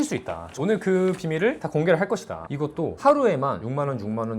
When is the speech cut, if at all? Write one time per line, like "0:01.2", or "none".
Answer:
0:02.4